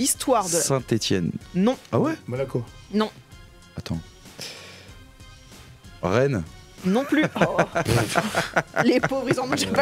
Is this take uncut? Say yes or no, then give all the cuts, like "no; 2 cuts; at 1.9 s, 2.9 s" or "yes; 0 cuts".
yes; 0 cuts